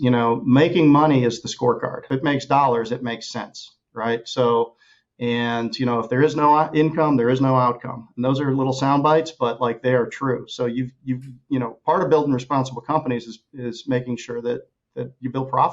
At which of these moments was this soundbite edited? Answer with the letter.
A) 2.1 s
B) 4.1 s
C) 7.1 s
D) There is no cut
A